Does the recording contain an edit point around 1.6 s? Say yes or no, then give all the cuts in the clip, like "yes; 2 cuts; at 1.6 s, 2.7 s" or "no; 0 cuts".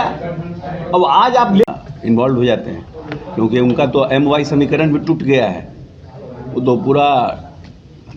yes; 1 cut; at 1.6 s